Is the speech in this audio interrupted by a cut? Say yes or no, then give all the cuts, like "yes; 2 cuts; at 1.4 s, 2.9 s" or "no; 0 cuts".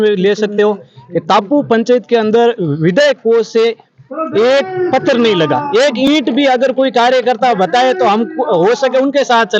no; 0 cuts